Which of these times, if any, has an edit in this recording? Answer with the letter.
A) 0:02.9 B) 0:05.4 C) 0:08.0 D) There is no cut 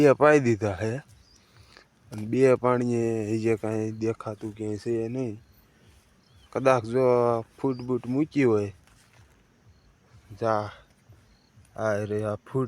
D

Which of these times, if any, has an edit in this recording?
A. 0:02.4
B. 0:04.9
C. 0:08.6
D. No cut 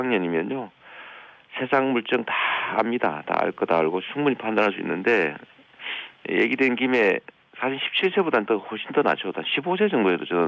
A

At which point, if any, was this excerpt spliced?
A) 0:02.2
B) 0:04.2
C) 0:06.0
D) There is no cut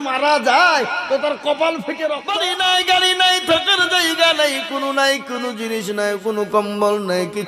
A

